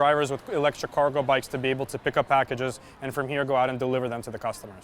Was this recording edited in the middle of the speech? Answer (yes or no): no